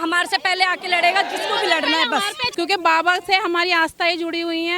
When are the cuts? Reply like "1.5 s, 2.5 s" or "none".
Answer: 2.4 s